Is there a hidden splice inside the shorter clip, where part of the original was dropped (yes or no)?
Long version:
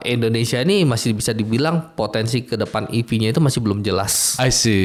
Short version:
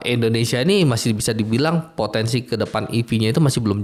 no